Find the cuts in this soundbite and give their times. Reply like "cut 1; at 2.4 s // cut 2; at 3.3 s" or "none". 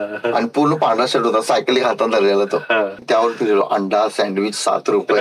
cut 1; at 3.0 s